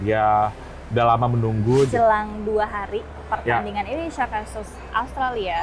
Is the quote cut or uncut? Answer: cut